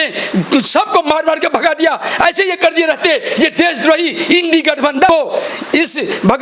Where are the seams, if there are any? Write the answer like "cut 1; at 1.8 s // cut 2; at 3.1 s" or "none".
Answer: cut 1; at 5.1 s